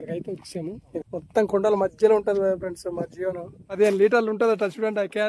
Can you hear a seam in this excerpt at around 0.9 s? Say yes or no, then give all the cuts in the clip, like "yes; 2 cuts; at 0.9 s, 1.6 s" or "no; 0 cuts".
yes; 2 cuts; at 0.9 s, 3.7 s